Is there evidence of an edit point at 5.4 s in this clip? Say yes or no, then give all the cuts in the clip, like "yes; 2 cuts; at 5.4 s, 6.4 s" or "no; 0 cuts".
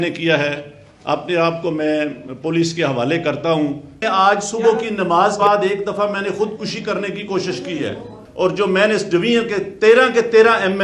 yes; 3 cuts; at 4.0 s, 5.4 s, 8.2 s